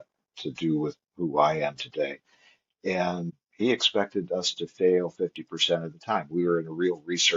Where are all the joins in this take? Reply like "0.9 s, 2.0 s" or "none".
3.4 s